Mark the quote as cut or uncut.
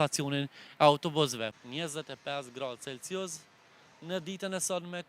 cut